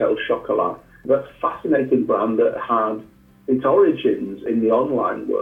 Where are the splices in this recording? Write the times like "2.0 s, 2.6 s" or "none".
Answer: 0.9 s